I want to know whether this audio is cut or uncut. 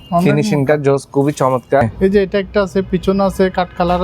cut